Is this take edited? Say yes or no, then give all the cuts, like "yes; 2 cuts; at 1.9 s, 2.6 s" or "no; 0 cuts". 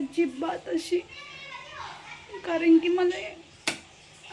no; 0 cuts